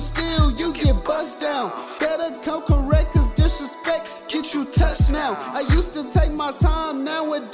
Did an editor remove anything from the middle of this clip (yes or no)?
no